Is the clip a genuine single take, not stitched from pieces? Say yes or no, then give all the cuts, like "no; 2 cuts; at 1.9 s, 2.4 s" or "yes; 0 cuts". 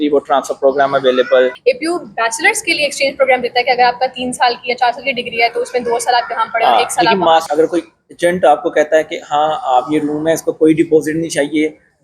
no; 2 cuts; at 1.6 s, 7.5 s